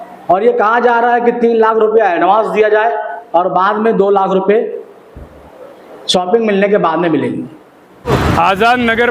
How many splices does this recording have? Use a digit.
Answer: 1